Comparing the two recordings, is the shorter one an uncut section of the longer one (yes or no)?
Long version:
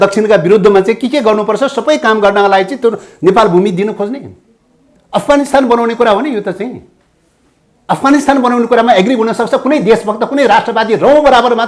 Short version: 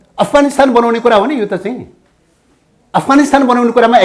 yes